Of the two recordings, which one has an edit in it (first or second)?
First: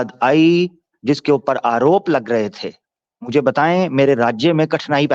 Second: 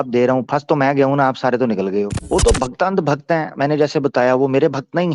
second